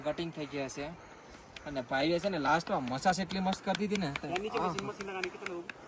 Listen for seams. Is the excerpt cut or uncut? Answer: uncut